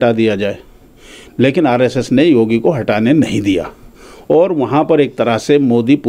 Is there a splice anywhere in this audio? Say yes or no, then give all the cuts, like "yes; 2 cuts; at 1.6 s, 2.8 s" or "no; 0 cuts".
no; 0 cuts